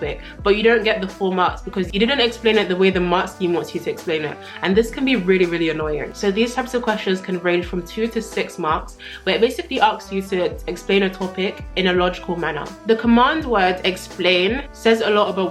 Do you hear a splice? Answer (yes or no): no